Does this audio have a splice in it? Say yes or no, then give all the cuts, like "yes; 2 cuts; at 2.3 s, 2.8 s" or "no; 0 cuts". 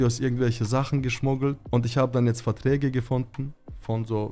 no; 0 cuts